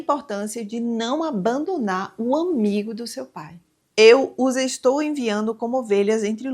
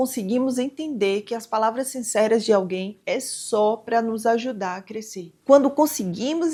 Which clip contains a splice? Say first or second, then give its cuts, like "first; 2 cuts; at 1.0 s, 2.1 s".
first; 1 cut; at 3.6 s